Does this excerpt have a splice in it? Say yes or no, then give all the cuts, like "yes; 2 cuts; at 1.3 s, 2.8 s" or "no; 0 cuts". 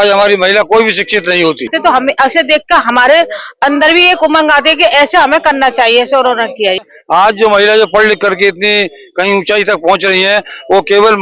yes; 2 cuts; at 1.7 s, 6.8 s